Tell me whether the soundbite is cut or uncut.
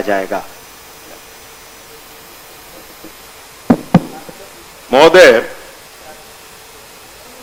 uncut